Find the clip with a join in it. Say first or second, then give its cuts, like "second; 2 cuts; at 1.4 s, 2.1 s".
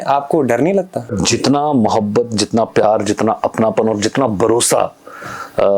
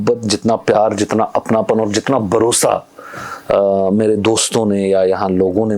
first; 1 cut; at 1.2 s